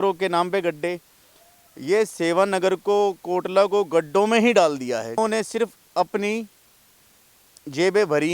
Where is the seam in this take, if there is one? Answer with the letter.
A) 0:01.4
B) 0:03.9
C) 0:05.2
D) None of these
C